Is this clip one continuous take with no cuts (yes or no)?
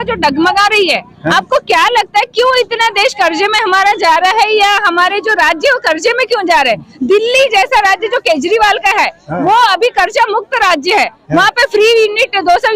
yes